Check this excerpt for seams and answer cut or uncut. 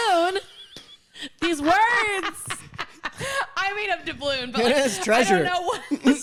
uncut